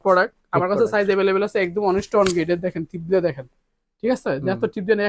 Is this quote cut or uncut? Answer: uncut